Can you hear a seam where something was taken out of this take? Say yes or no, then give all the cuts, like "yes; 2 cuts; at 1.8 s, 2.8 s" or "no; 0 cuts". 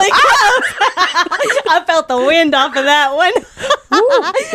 no; 0 cuts